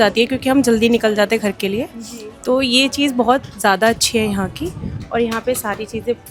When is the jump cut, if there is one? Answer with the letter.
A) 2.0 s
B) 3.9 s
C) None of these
C